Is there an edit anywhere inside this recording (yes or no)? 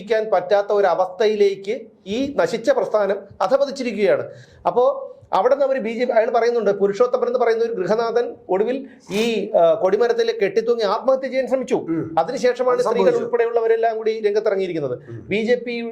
no